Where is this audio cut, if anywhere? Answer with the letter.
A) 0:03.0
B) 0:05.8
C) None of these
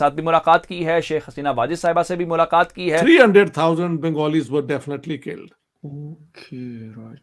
A